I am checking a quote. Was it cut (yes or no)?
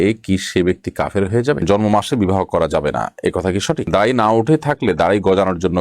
yes